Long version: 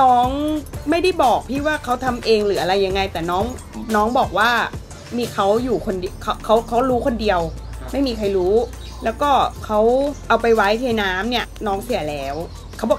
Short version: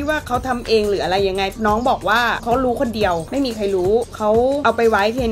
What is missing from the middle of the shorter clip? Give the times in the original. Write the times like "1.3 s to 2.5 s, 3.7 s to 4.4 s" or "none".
3.1 s to 3.8 s, 4.7 s to 6.7 s, 7.5 s to 7.9 s, 9.1 s to 10.1 s